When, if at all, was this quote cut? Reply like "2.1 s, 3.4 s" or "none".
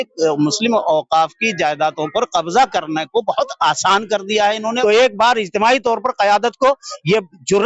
4.8 s

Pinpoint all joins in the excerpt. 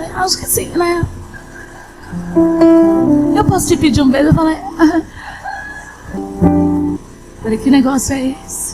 6.2 s, 7.1 s

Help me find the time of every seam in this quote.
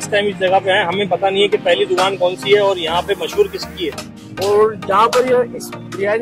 4.1 s

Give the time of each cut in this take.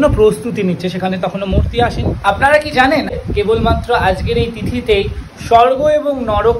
2.1 s, 3.2 s

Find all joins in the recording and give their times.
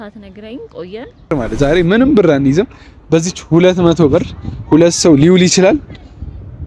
1.3 s

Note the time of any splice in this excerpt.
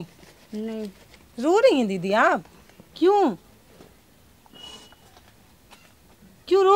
1.0 s

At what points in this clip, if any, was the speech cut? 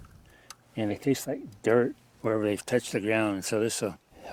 0.9 s

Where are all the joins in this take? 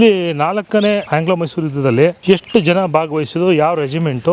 1.1 s, 2.2 s

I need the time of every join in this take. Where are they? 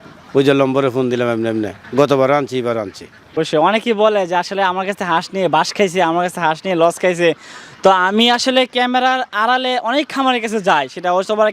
3.4 s

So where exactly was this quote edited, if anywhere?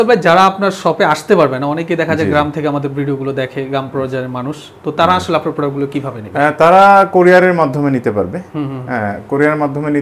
none

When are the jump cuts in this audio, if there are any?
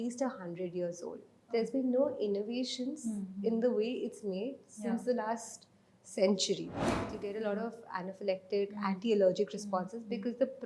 7.1 s

